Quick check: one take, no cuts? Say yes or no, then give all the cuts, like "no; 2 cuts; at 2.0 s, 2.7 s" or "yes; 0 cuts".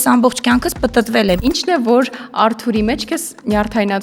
no; 1 cut; at 1.4 s